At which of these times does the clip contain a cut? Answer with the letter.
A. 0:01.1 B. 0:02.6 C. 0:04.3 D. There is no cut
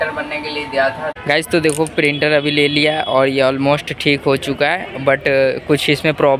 A